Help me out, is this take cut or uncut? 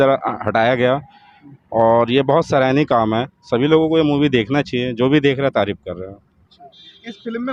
uncut